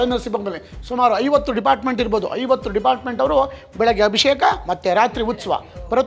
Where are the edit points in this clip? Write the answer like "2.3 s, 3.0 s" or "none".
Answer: none